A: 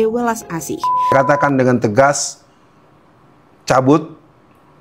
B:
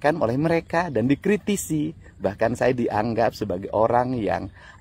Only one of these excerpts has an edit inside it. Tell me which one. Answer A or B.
A